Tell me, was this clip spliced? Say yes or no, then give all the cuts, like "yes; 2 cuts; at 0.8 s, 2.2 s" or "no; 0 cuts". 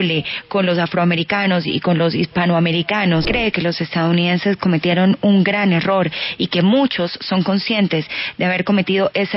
yes; 1 cut; at 3.3 s